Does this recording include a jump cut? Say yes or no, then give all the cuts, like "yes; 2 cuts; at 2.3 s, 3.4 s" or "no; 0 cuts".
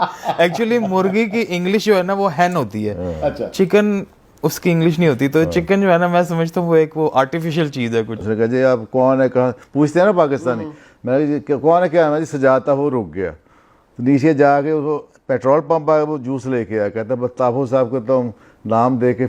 yes; 1 cut; at 8.2 s